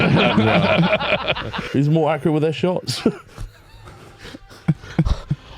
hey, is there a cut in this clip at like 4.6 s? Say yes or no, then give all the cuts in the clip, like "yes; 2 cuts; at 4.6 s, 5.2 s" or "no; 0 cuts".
no; 1 cut; at 1.6 s